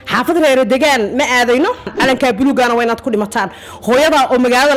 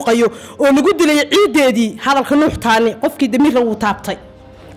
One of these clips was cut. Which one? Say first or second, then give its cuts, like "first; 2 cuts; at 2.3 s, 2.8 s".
first; 1 cut; at 1.9 s